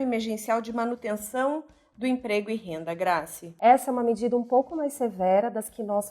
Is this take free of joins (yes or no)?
no